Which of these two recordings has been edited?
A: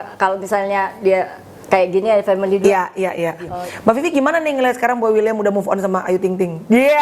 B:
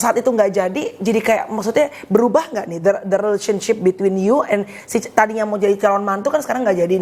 A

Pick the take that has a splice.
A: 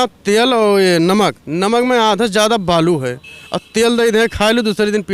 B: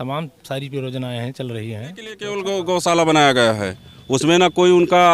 B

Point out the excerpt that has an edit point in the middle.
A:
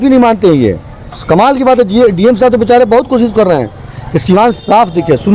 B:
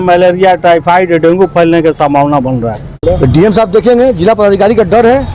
B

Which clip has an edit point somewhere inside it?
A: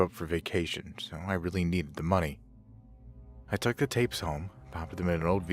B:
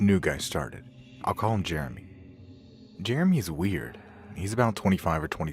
A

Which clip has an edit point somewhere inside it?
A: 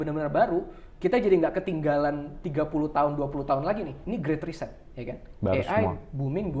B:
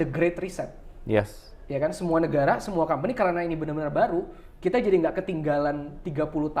A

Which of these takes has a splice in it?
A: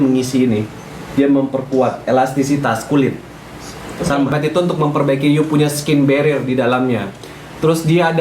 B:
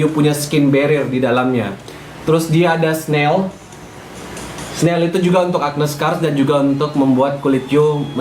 A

